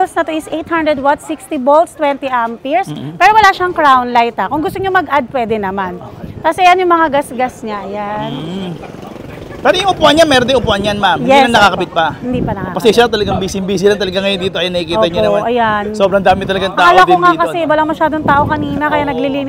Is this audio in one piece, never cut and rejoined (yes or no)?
yes